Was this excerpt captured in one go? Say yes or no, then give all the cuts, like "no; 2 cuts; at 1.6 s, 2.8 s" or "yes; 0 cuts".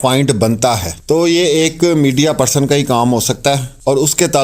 no; 1 cut; at 0.9 s